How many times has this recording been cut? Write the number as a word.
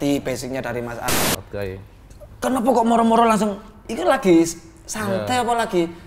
one